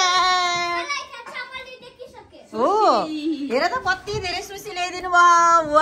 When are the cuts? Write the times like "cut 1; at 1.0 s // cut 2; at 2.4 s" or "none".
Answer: none